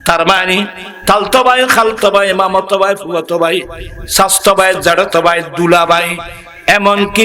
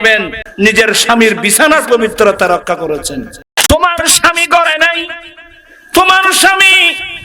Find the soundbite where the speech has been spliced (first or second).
second